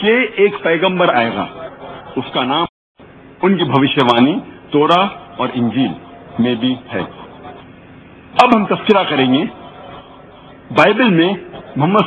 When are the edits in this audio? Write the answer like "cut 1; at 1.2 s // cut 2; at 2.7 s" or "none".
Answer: cut 1; at 2.8 s